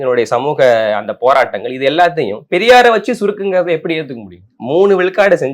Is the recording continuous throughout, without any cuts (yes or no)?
no